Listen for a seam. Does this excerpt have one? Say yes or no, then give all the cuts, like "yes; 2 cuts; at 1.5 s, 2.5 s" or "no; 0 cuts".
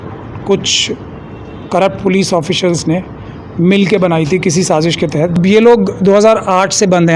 yes; 1 cut; at 5.4 s